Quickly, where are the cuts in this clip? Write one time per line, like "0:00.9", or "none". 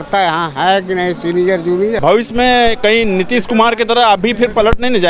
0:02.0